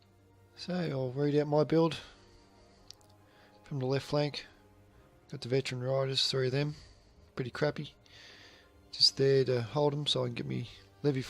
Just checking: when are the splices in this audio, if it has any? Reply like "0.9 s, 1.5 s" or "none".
6.0 s

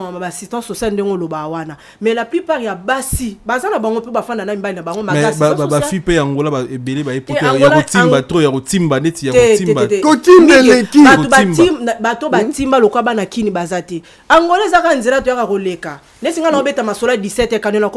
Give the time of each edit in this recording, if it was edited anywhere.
none

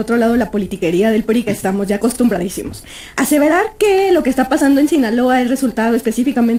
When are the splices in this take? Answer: none

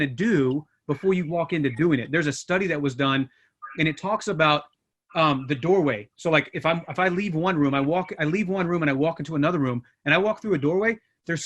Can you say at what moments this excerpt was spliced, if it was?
none

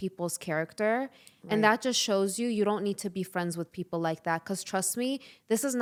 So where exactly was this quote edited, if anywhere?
none

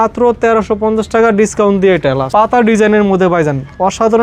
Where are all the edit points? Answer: 2.2 s

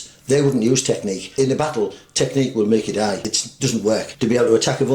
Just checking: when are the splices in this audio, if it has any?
1.2 s, 3.4 s, 4.1 s

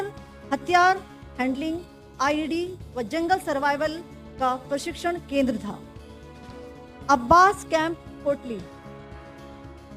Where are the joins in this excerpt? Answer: 8.6 s

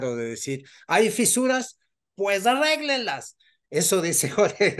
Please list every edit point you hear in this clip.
none

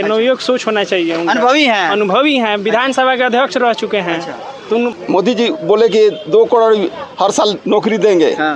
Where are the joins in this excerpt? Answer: 4.9 s

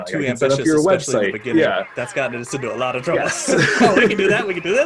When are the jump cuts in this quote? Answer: none

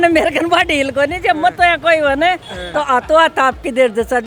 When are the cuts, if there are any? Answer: none

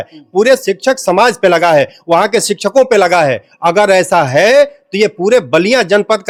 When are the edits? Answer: none

